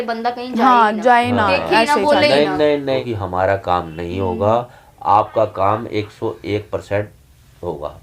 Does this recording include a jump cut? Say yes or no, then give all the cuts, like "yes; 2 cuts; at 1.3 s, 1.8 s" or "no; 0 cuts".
yes; 1 cut; at 3.0 s